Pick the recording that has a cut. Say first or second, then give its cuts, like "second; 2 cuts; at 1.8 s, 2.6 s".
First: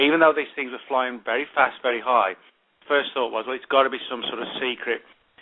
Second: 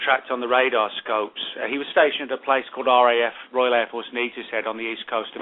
first; 1 cut; at 4.5 s